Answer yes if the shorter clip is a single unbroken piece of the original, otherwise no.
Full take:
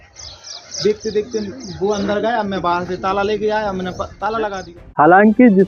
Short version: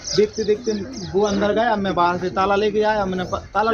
yes